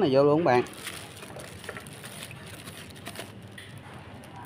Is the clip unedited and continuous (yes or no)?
yes